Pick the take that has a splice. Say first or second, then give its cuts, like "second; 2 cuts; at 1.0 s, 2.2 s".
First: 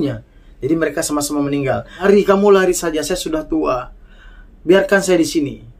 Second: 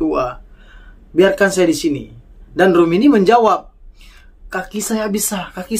first; 1 cut; at 2.0 s